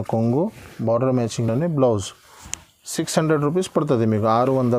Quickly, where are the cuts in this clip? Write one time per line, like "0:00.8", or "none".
none